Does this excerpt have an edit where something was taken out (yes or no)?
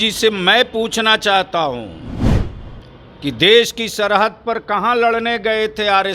no